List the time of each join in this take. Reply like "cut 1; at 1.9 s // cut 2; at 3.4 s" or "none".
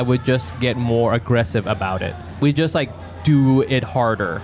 cut 1; at 2.4 s